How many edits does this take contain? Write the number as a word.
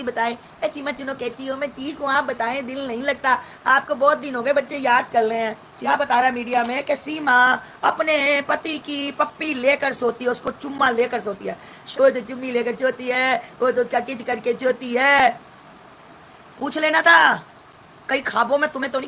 two